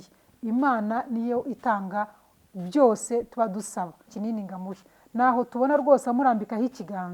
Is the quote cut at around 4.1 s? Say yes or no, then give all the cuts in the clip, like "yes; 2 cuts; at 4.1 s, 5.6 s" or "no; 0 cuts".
yes; 1 cut; at 4.1 s